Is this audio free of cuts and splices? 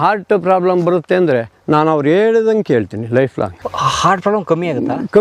yes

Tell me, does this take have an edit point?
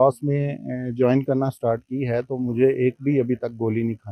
no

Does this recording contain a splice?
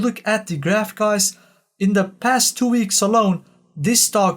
no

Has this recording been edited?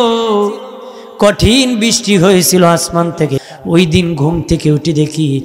yes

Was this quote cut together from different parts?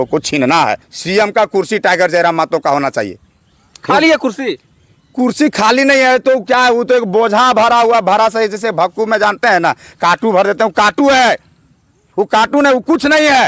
yes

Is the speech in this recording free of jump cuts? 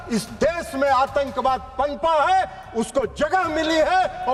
yes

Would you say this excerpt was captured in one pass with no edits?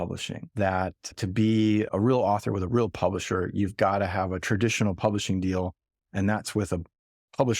no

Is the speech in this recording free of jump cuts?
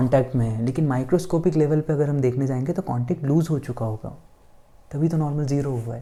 yes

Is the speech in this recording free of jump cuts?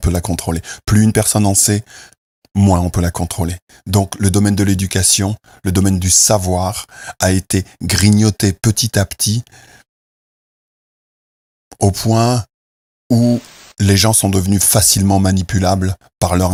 yes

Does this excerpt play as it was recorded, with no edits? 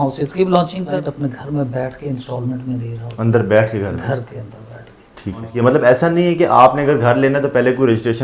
no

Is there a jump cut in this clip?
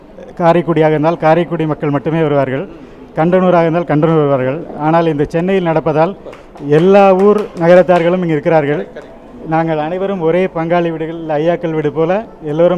no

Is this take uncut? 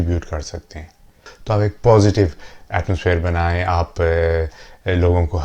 no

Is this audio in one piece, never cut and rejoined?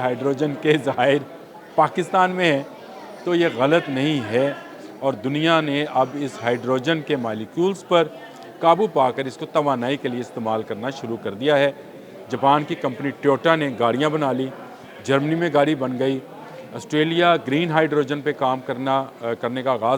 yes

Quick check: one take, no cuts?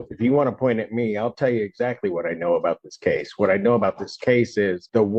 yes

